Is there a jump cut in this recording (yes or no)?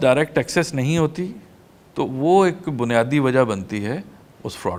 no